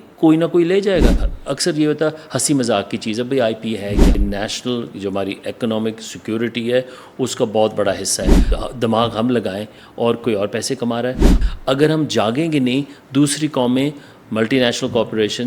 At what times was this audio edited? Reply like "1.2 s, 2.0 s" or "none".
1.3 s, 4.2 s, 8.5 s, 11.4 s